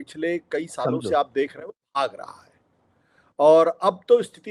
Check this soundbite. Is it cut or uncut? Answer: uncut